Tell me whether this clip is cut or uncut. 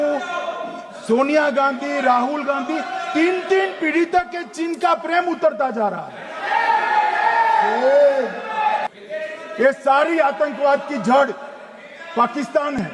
uncut